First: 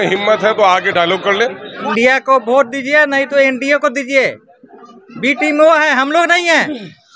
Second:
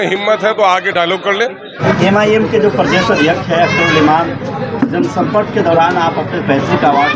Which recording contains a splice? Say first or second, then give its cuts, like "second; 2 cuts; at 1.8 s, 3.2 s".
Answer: first; 1 cut; at 1.7 s